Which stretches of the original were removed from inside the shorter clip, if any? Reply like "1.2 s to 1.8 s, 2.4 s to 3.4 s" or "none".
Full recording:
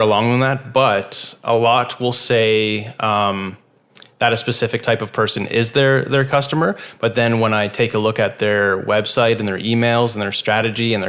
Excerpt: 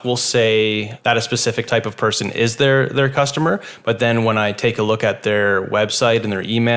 2.9 s to 4.1 s